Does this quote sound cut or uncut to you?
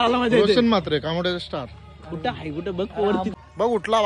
cut